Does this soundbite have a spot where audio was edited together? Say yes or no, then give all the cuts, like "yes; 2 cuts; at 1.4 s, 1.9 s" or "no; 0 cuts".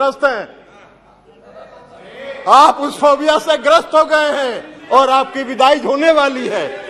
no; 0 cuts